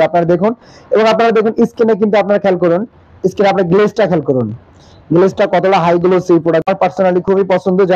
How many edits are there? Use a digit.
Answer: 1